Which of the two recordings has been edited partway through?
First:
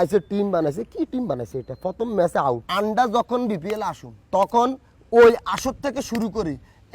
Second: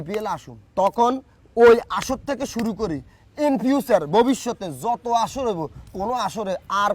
first; 1 cut; at 2.6 s

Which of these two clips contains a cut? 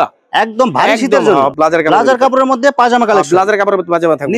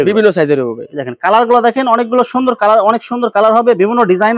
first; 1 cut; at 1.5 s

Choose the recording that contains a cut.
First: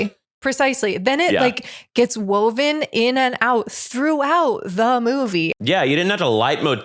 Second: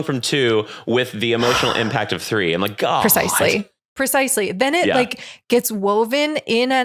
first; 1 cut; at 5.5 s

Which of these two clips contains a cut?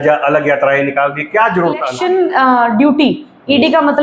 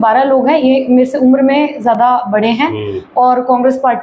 first; 1 cut; at 1.9 s

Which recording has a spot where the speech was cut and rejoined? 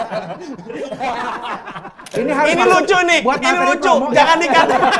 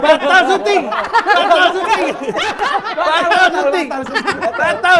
first; 1 cut; at 2.1 s

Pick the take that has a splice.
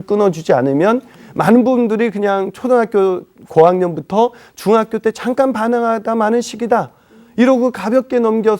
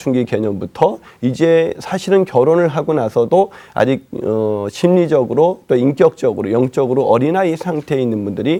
first; 1 cut; at 1.1 s

